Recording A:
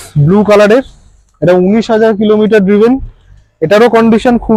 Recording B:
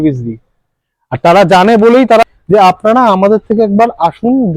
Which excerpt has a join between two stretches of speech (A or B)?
B